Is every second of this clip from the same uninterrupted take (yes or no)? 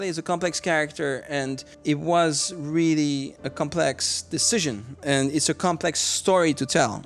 no